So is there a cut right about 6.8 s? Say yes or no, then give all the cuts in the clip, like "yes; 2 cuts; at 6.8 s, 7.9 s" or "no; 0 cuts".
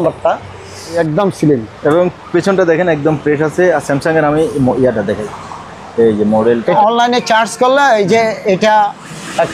yes; 2 cuts; at 1.0 s, 6.8 s